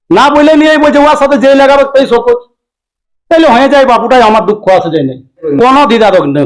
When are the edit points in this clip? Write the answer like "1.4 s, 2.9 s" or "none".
5.4 s

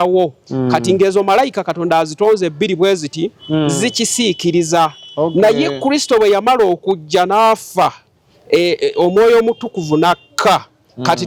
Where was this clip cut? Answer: none

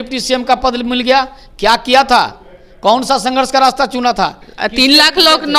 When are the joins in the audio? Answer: none

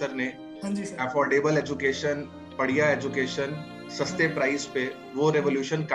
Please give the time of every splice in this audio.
none

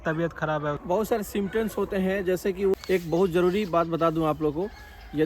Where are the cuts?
0.8 s, 2.7 s

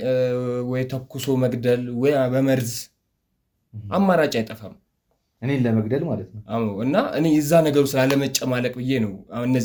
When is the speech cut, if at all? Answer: none

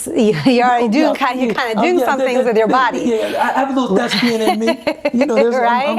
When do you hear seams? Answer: none

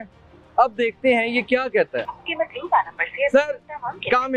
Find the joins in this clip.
2.0 s

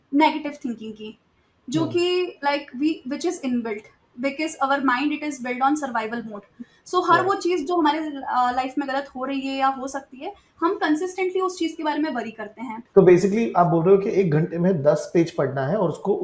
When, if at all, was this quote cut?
12.7 s

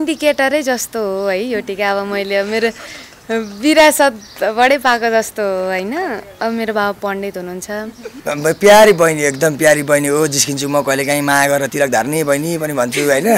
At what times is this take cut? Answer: 8.0 s

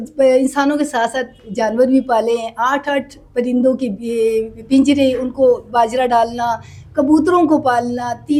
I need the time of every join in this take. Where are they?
none

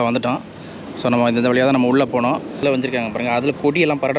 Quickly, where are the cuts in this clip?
2.6 s

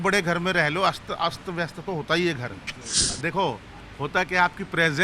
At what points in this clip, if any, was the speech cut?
3.1 s

